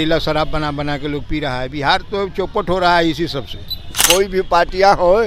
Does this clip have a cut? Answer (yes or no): yes